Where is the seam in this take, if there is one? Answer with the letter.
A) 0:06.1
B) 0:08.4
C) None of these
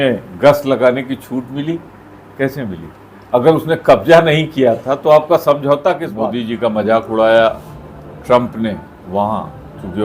A